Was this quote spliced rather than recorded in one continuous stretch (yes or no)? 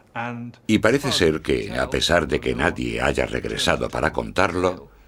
no